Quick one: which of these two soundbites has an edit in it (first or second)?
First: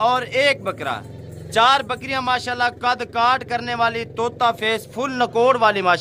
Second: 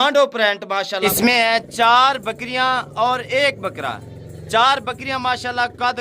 second